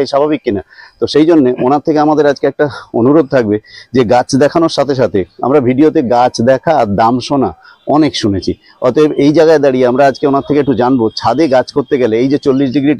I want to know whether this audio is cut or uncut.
uncut